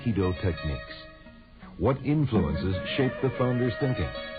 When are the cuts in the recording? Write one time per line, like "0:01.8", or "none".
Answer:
none